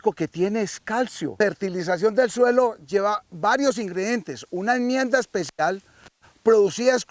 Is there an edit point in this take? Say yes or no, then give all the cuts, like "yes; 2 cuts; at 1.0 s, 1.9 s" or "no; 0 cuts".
yes; 1 cut; at 1.3 s